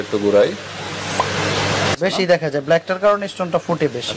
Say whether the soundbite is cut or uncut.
cut